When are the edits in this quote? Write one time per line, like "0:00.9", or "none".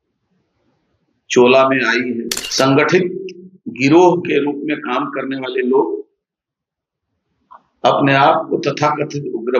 0:02.4